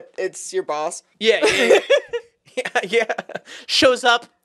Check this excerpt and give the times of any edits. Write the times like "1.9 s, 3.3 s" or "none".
1.0 s